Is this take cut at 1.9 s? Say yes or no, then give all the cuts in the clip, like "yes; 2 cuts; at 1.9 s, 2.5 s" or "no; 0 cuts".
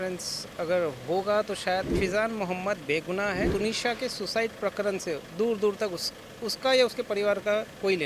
yes; 2 cuts; at 1.9 s, 3.5 s